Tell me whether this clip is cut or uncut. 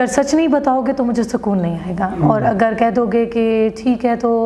uncut